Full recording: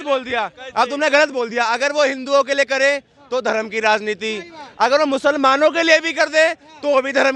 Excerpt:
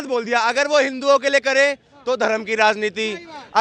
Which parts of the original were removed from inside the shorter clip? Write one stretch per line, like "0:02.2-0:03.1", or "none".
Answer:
none